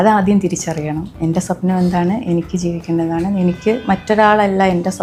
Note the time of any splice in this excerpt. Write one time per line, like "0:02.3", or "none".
none